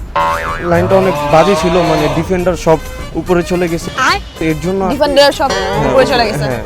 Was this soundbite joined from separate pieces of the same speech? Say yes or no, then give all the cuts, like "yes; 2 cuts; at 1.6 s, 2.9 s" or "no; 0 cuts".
no; 0 cuts